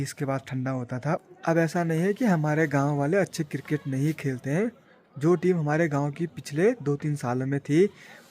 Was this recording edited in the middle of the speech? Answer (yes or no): yes